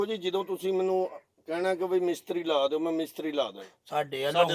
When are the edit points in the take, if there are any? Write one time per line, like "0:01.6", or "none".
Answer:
none